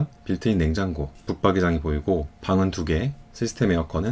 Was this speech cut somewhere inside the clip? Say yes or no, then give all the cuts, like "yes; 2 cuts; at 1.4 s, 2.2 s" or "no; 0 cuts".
yes; 1 cut; at 2.3 s